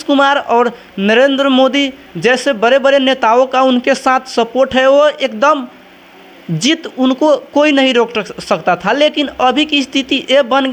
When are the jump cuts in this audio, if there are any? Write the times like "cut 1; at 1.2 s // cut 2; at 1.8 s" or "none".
none